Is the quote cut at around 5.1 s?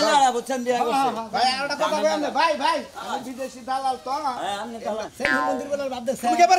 yes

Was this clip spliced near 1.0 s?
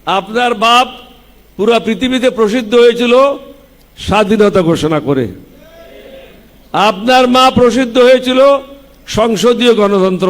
no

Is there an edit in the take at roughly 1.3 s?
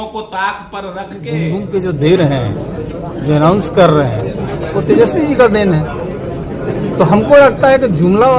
yes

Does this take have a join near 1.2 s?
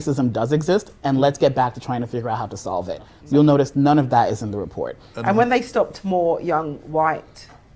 no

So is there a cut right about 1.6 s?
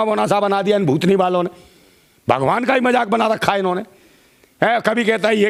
no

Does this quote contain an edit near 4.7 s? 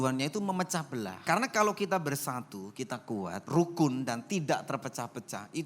no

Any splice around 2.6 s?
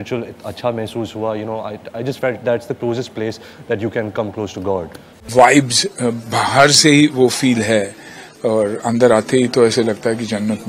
no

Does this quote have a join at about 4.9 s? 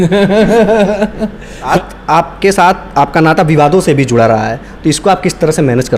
no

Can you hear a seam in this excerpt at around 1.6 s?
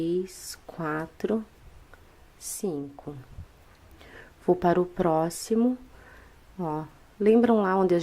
yes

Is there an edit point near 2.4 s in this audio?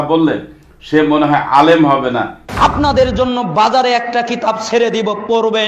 yes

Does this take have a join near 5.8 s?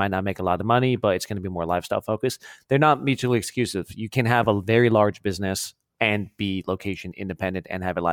yes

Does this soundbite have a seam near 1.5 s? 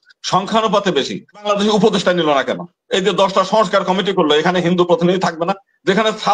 yes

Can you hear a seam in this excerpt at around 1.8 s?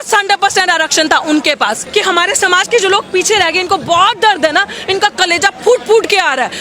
yes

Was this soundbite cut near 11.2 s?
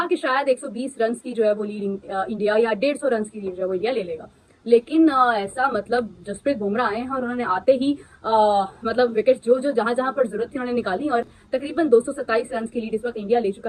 no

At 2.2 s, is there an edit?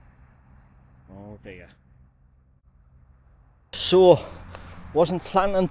no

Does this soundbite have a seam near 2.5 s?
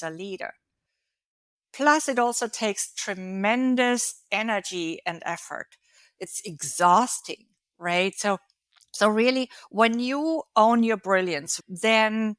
no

